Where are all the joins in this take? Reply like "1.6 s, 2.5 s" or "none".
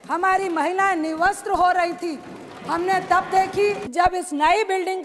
3.9 s